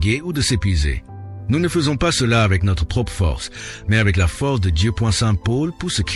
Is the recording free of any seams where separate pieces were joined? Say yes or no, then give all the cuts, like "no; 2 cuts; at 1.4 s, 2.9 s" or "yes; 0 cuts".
yes; 0 cuts